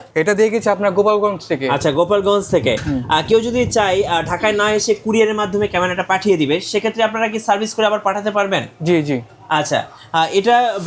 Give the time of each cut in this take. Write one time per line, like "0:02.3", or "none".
none